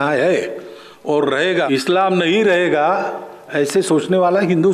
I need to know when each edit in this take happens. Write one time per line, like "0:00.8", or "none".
0:01.7